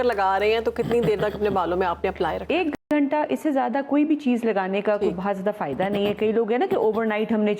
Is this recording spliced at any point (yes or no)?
no